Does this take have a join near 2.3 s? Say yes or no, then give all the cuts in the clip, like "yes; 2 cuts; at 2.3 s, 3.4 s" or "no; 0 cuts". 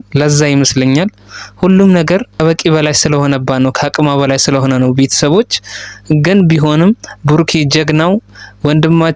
yes; 1 cut; at 2.3 s